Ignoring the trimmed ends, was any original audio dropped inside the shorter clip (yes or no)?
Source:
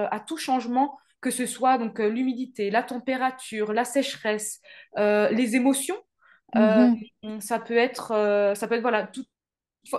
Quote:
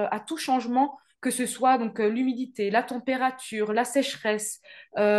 no